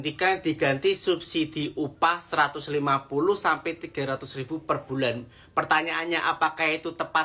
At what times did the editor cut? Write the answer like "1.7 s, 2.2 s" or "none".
none